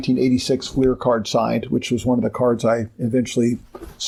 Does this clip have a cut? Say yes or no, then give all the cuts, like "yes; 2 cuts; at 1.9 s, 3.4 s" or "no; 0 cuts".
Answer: no; 0 cuts